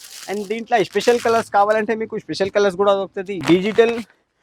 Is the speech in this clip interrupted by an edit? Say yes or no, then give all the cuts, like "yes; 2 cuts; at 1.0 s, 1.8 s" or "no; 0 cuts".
yes; 1 cut; at 3.4 s